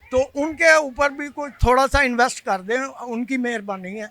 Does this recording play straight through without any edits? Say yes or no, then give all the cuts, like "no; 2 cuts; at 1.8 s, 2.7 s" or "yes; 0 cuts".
yes; 0 cuts